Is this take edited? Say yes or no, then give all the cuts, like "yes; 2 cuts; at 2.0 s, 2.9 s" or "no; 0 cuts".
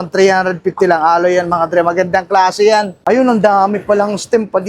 yes; 1 cut; at 2.9 s